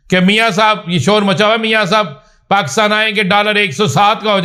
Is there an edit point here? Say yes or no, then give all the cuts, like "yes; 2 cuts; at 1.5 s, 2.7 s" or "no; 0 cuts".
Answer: no; 0 cuts